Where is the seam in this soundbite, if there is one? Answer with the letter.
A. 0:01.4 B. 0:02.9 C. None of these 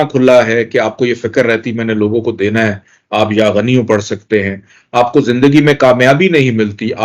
C